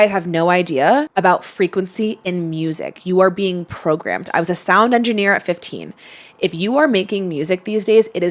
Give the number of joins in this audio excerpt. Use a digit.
1